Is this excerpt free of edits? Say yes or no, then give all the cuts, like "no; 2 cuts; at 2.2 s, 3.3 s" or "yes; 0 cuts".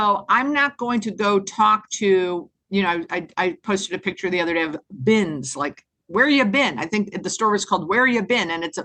yes; 0 cuts